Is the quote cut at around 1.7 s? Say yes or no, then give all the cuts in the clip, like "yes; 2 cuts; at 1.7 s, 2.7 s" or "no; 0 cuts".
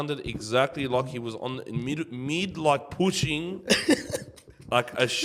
no; 0 cuts